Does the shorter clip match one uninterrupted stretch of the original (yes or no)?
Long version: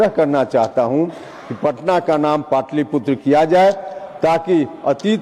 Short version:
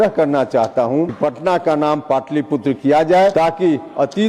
no